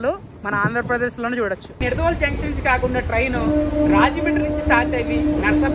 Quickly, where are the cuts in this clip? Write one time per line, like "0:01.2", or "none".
0:01.8